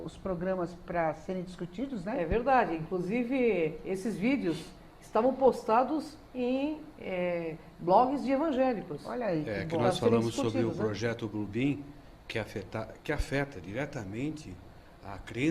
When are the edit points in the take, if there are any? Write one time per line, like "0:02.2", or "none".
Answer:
0:02.3